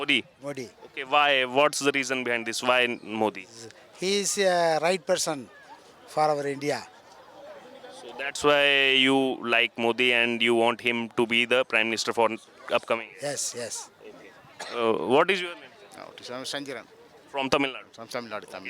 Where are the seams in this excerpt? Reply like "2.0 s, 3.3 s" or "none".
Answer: none